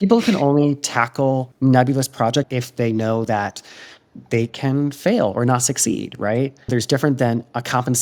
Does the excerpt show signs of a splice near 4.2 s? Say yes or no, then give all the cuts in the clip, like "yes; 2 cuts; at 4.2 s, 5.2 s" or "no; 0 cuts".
no; 3 cuts; at 1.5 s, 2.6 s, 6.7 s